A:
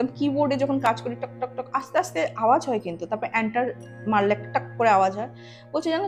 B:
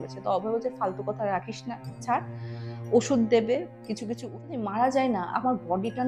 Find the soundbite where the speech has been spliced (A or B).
B